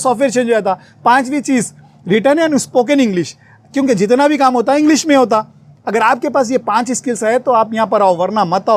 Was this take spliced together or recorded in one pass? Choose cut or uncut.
uncut